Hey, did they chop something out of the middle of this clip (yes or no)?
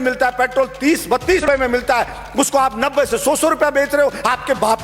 yes